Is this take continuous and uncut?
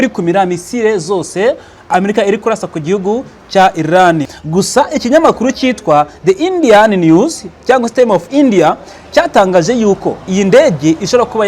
no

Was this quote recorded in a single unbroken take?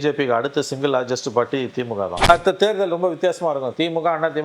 no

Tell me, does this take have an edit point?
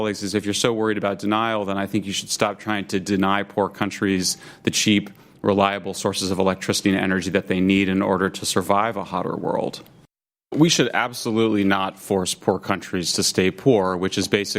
yes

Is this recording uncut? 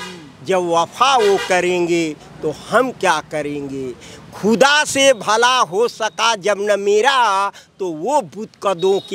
yes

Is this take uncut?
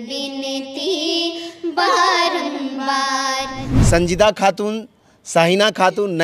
no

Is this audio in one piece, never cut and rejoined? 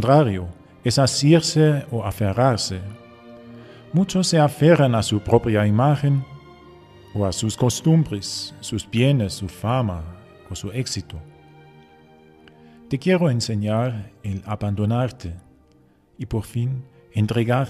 yes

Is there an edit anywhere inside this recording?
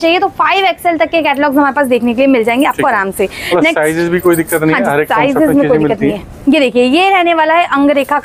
no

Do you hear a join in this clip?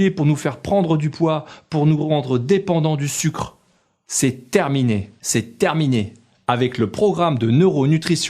yes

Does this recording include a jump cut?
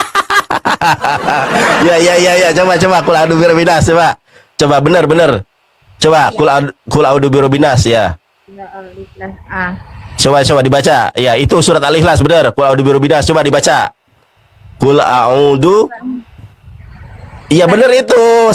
no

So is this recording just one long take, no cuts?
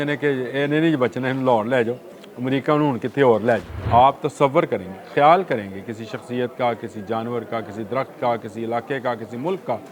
no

